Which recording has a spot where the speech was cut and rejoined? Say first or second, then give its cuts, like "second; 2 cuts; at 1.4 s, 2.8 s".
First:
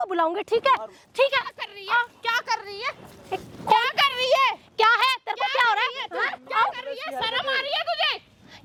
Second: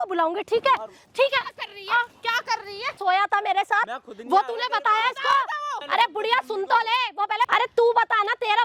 second; 3 cuts; at 3.0 s, 5.8 s, 7.5 s